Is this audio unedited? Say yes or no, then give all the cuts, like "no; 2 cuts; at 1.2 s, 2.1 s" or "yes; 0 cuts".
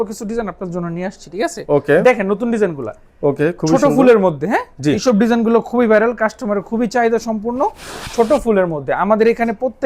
yes; 0 cuts